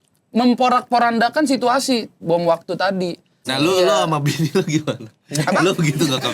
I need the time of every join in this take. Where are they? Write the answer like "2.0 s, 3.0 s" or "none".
3.5 s